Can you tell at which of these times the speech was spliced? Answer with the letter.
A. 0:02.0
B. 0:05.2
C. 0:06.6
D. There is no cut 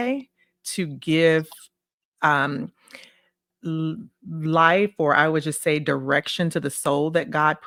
D